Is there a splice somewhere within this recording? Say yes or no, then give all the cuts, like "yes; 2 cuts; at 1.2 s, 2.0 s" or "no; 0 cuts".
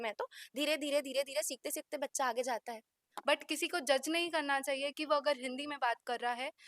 yes; 1 cut; at 3.0 s